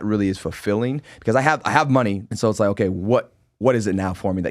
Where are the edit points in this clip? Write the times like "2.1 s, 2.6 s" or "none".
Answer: 2.3 s